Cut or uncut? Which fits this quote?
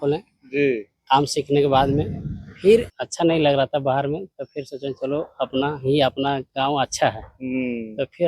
cut